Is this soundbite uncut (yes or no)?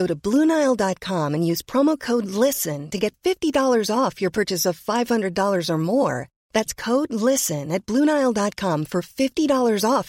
yes